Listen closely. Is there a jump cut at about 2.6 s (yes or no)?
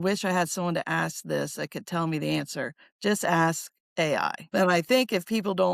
no